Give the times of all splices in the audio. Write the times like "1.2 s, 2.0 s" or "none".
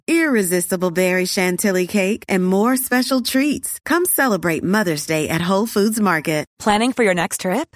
6.5 s